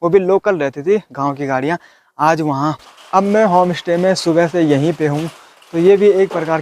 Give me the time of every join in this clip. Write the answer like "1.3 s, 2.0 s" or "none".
2.8 s